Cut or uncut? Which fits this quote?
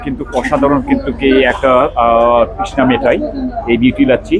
uncut